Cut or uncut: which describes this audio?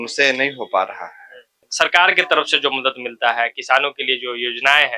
cut